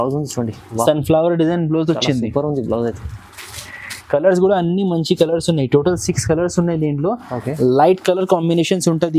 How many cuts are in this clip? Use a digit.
0